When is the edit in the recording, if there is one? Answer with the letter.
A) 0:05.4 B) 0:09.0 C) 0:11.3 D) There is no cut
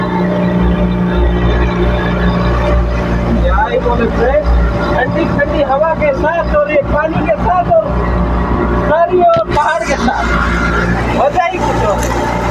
D